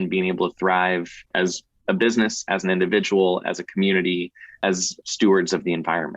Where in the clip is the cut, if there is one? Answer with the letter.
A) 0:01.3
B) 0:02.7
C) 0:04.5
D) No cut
A